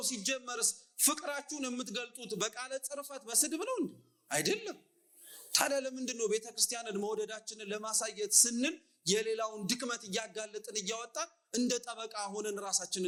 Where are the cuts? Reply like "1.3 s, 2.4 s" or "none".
none

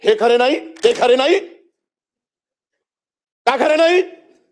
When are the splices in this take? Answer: none

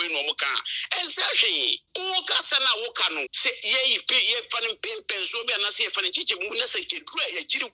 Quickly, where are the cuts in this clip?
1.8 s, 3.3 s

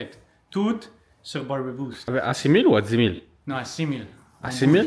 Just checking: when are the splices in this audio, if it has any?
2.0 s

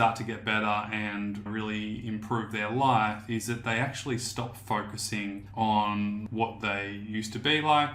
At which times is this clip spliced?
5.4 s, 6.3 s

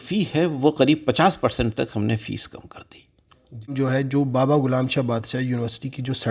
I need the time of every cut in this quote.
3.7 s

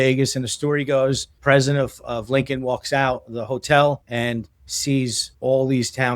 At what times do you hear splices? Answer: 1.3 s, 4.0 s, 5.2 s

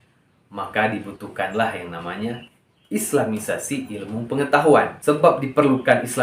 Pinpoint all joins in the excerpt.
5.2 s

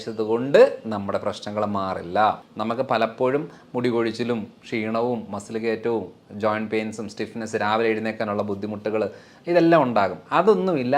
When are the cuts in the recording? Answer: 2.5 s

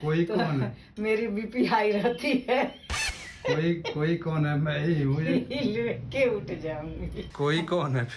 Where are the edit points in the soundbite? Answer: none

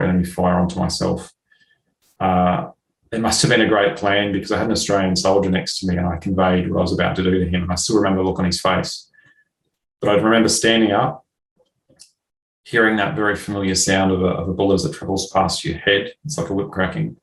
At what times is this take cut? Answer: none

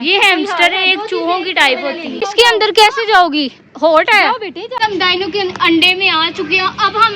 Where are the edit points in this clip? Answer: 2.1 s, 4.8 s

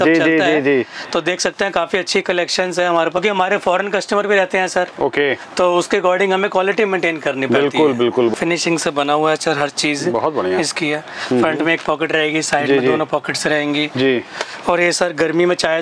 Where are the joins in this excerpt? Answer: 3.2 s, 8.3 s

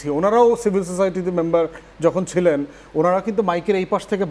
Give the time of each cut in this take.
none

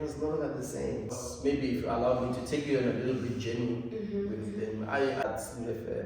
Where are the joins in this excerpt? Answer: 1.2 s, 5.2 s

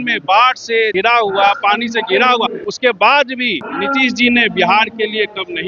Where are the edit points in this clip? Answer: 0.9 s, 2.6 s, 3.6 s

